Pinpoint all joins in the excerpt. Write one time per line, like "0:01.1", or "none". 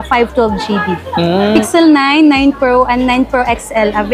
0:01.6